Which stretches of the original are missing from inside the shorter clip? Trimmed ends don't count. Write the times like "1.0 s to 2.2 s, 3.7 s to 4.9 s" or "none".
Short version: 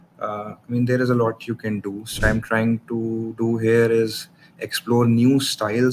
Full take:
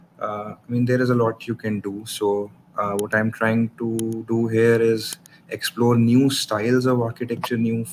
2.2 s to 3.1 s